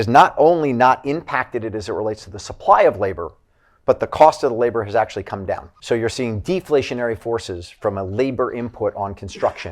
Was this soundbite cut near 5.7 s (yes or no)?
yes